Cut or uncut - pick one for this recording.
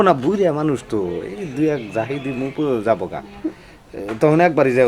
uncut